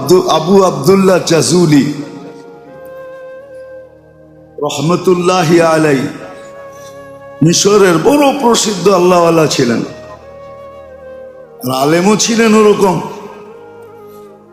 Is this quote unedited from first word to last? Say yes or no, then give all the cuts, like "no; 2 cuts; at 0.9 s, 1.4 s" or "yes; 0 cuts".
no; 4 cuts; at 2.3 s, 4.0 s, 9.9 s, 11.5 s